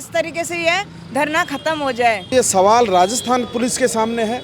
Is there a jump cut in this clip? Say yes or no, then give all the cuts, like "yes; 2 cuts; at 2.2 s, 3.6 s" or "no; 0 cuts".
yes; 1 cut; at 2.3 s